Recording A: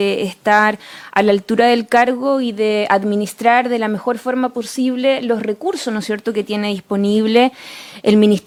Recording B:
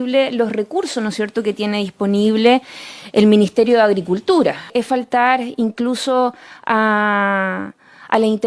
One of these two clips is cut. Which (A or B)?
B